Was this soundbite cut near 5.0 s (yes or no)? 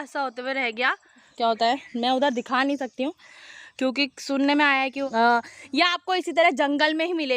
yes